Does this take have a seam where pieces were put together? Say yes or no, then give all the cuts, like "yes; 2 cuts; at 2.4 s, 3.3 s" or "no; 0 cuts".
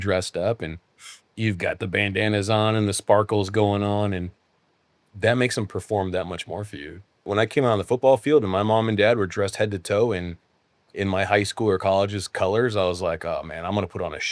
yes; 1 cut; at 7.3 s